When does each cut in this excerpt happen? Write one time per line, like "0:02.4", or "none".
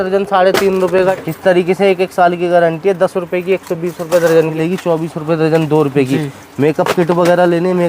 0:01.2
0:04.5

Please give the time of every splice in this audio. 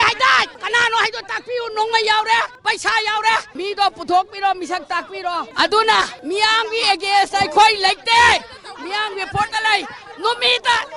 0:02.5
0:03.5
0:05.5

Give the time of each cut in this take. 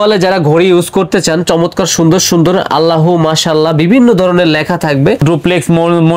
0:05.2

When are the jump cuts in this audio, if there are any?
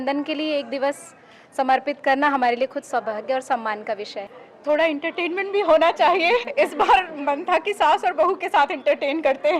0:04.3

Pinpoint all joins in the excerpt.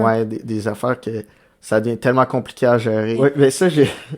0:03.2

